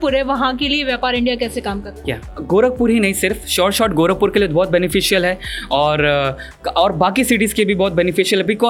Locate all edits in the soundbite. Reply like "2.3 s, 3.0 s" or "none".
none